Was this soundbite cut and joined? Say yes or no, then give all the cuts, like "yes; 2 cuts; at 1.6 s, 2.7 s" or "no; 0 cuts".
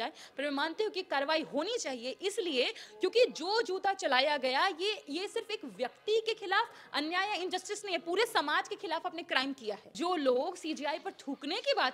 yes; 1 cut; at 9.9 s